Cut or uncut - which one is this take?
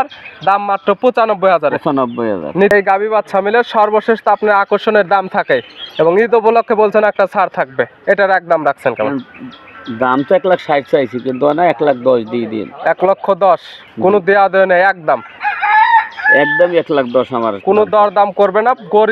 cut